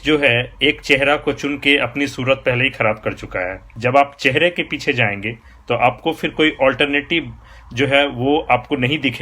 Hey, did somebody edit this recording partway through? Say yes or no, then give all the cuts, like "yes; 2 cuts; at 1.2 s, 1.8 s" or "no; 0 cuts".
yes; 1 cut; at 3.6 s